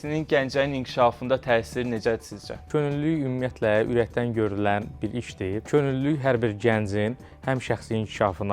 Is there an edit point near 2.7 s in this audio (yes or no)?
yes